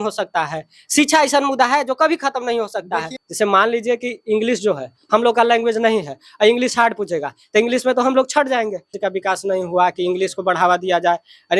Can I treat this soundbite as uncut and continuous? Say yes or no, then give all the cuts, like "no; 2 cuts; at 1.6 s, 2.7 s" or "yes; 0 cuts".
no; 2 cuts; at 3.2 s, 8.9 s